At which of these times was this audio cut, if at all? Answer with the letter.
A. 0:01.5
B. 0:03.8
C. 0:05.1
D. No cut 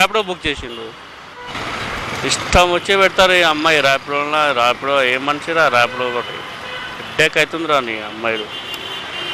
A